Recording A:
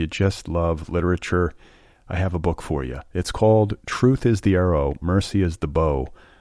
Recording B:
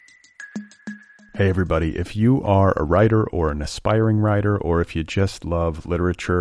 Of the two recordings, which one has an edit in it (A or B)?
B